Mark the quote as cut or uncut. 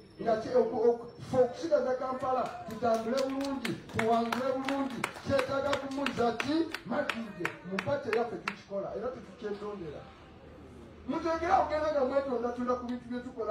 uncut